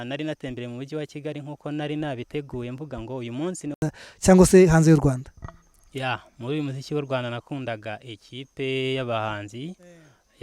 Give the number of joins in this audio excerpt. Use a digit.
1